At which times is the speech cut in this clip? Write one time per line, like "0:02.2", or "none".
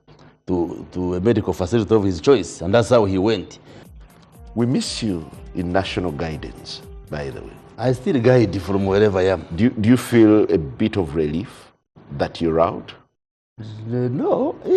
0:03.8